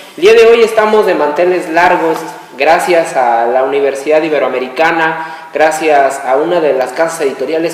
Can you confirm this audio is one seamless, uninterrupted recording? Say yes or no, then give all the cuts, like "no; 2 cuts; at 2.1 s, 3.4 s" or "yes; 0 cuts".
no; 1 cut; at 6.3 s